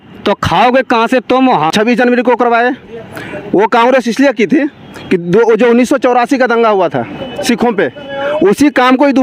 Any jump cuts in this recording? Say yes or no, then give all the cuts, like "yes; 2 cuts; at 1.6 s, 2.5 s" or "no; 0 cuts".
yes; 1 cut; at 1.7 s